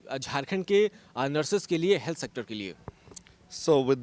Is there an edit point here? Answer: no; 0 cuts

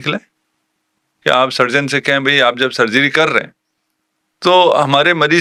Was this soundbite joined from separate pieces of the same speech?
no; 0 cuts

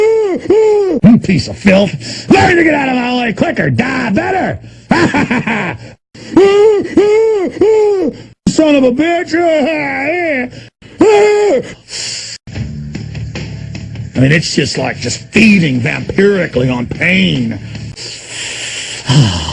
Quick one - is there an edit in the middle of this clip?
no; 0 cuts

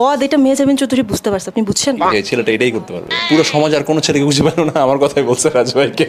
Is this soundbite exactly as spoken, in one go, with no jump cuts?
no; 2 cuts; at 2.0 s, 3.2 s

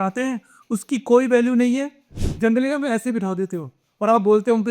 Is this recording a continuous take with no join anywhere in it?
no; 1 cut; at 2.2 s

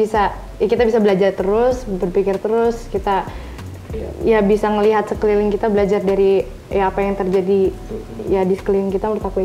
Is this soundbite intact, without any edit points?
yes; 0 cuts

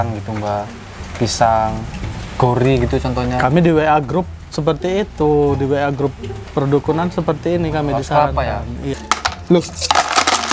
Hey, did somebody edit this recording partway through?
yes; 1 cut; at 9.0 s

